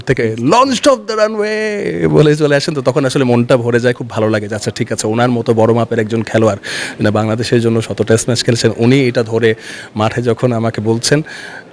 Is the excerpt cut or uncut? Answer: uncut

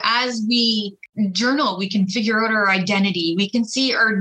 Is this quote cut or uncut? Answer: cut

